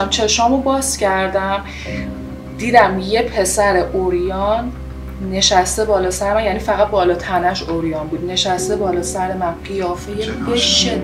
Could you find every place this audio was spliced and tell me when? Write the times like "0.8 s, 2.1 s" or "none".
none